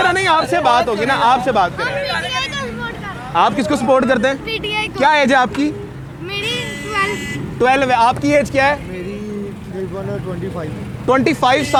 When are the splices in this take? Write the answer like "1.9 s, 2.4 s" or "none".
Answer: none